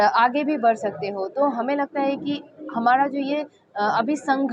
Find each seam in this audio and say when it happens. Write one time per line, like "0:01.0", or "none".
none